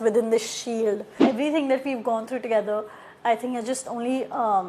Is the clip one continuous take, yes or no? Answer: no